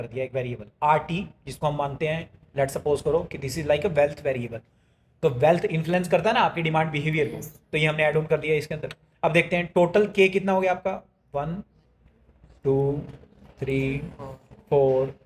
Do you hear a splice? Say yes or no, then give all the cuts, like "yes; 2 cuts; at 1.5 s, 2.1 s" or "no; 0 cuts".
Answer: no; 0 cuts